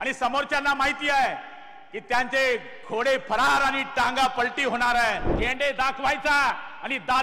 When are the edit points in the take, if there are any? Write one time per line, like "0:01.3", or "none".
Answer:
0:05.4